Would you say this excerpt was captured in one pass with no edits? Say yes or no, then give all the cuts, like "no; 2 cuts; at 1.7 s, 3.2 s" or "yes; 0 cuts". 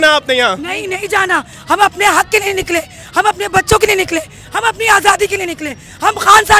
yes; 0 cuts